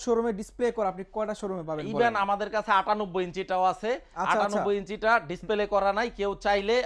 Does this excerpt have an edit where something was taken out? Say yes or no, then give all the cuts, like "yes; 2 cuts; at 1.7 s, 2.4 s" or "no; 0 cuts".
no; 0 cuts